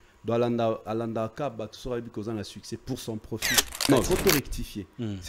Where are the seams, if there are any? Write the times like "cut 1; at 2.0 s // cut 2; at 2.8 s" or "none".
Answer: cut 1; at 3.8 s